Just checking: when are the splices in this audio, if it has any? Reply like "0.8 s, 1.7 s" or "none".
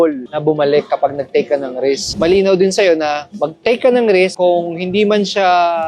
2.1 s